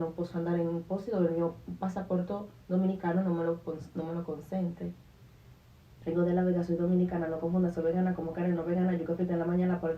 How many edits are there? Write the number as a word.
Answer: one